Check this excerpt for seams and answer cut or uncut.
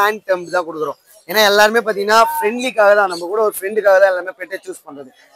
uncut